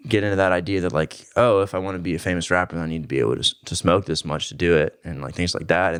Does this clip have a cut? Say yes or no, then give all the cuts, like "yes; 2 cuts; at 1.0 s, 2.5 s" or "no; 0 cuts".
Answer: no; 0 cuts